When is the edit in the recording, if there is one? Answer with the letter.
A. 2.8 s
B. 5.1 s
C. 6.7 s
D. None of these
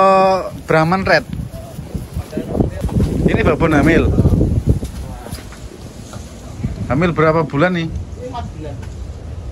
A